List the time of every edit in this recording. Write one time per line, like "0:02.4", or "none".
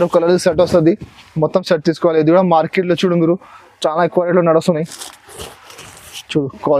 none